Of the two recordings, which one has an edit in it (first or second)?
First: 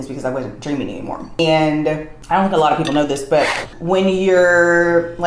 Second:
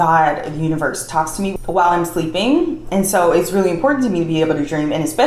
first